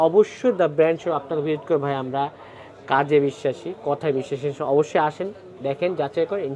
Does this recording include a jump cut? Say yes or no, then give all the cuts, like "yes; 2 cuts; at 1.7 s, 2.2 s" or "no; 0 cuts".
no; 0 cuts